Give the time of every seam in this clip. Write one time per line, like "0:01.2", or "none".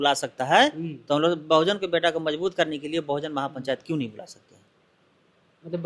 none